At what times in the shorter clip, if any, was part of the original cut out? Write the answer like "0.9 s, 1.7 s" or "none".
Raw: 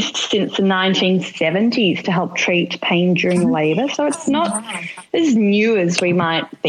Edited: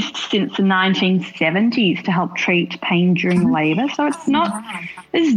none